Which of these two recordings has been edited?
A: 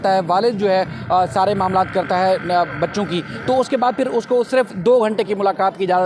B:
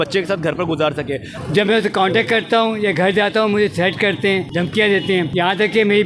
B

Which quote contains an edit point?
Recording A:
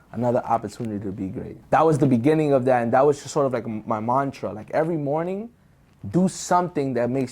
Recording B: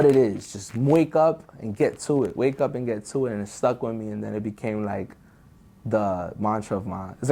A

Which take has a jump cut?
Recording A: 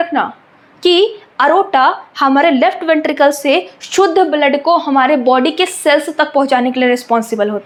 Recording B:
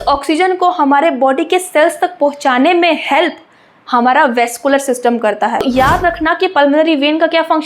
B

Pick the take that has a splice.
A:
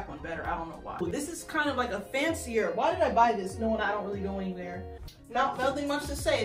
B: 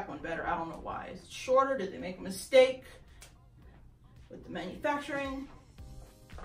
A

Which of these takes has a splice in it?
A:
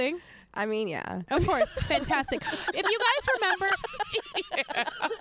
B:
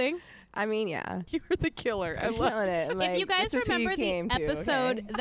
B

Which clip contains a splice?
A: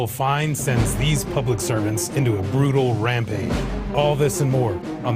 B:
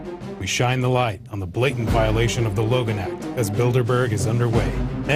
A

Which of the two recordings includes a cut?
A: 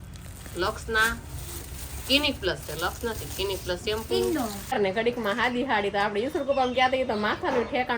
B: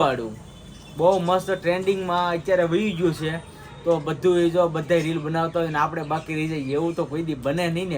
A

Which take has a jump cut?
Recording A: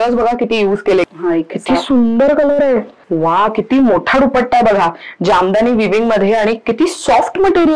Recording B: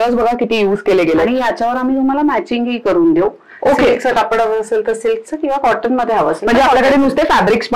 A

